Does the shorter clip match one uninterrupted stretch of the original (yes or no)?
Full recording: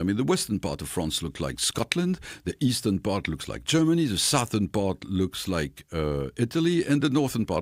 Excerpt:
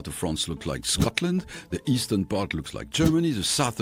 yes